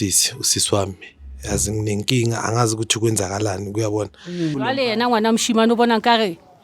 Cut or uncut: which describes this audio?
cut